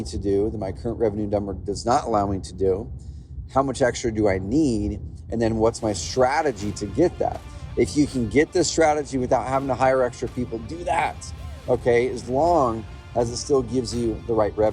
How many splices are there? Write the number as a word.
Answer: zero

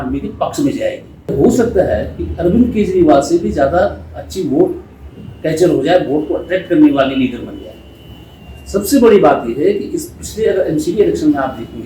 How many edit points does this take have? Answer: one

